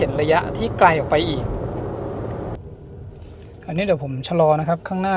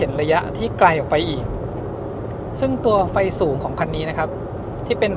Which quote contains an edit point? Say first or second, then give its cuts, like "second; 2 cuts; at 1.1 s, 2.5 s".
first; 1 cut; at 2.6 s